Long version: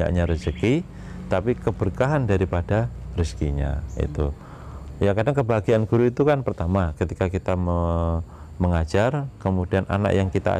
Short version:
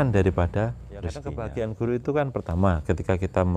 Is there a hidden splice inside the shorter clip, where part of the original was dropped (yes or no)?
yes